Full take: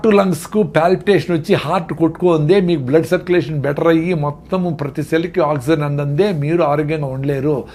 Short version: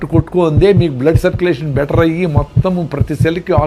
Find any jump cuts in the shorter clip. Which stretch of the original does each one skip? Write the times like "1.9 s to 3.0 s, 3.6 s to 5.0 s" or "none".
none